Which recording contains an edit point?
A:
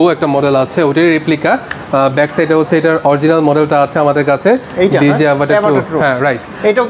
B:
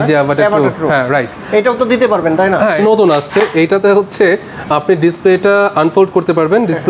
B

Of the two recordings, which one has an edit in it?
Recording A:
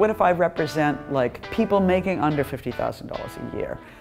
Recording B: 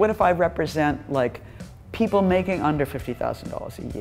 A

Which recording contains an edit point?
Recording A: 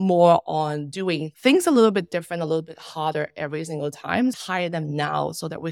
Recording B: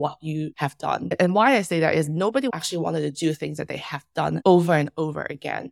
A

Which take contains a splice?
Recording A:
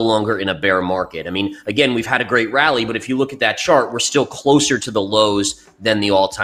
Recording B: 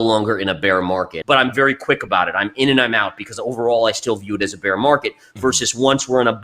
B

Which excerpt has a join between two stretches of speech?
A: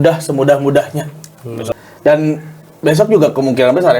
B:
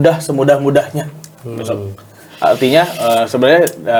A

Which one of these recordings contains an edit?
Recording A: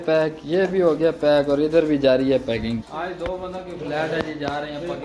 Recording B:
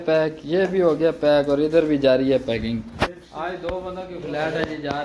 A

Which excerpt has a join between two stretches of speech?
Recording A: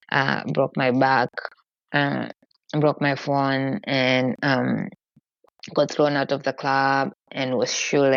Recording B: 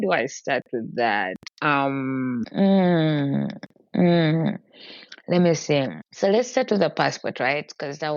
B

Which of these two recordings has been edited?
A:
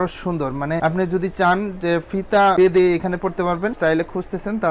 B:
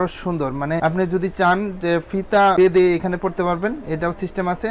A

